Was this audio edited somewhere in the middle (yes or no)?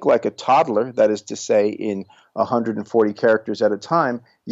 no